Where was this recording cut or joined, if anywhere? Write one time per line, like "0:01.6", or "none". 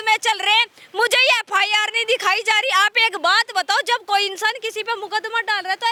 none